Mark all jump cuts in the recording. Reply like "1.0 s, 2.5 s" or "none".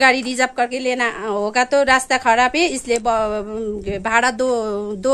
none